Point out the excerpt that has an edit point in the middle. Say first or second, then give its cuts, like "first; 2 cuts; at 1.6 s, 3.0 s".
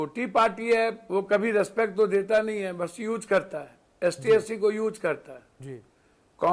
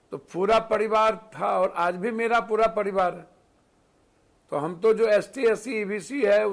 first; 1 cut; at 1.0 s